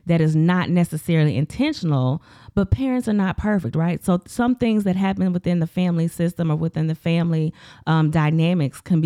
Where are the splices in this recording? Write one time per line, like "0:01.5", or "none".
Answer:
none